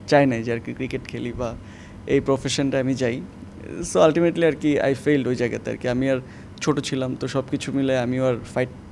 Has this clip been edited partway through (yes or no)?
no